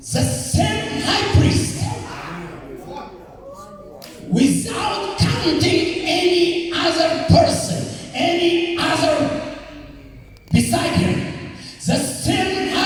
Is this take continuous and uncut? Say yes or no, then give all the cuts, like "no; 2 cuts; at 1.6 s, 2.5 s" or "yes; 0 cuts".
yes; 0 cuts